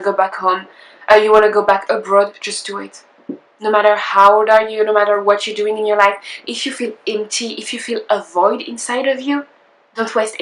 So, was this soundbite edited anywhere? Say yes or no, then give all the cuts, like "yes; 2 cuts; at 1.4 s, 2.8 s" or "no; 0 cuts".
no; 0 cuts